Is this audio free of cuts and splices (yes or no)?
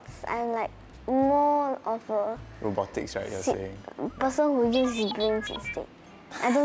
yes